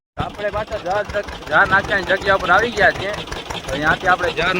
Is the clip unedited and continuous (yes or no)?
yes